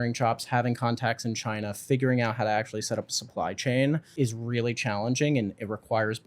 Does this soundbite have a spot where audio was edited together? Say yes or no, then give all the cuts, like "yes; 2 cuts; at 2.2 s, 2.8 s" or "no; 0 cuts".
yes; 1 cut; at 4.1 s